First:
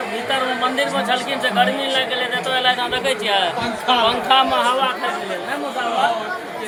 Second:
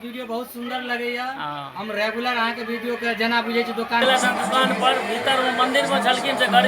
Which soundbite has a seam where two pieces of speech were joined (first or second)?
second